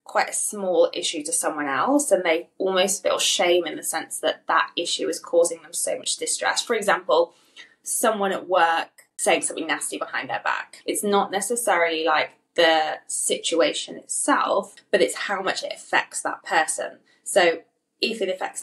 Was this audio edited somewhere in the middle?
yes; 3 cuts; at 9.0 s, 10.7 s, 14.8 s

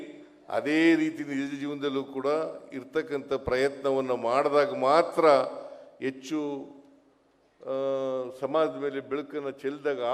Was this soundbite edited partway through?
no; 0 cuts

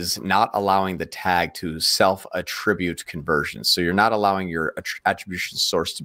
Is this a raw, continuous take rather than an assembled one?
yes; 0 cuts

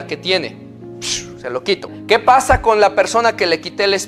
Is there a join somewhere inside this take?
yes; 1 cut; at 2.0 s

